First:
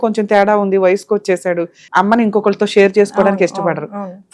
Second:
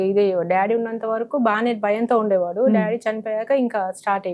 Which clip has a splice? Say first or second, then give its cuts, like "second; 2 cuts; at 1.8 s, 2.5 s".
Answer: first; 1 cut; at 1.8 s